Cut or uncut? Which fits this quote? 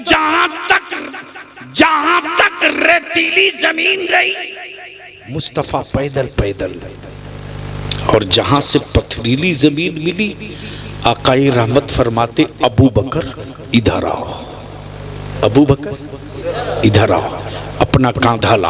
uncut